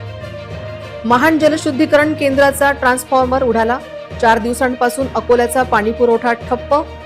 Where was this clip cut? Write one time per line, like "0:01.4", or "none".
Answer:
0:01.0